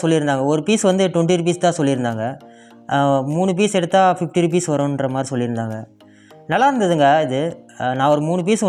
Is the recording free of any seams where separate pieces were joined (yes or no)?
yes